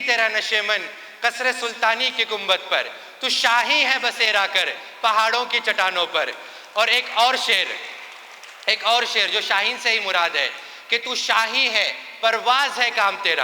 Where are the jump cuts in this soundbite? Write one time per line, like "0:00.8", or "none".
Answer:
none